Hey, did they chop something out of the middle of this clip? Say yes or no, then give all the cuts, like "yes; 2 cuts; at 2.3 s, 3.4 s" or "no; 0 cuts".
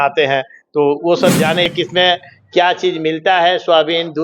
yes; 1 cut; at 1.7 s